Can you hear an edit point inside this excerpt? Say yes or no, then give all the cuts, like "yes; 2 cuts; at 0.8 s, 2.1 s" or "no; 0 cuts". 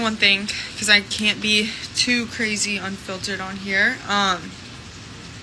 yes; 1 cut; at 4.5 s